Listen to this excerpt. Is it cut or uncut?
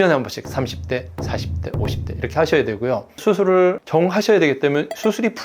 cut